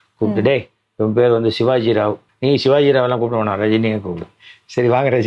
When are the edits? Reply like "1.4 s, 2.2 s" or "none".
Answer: 2.3 s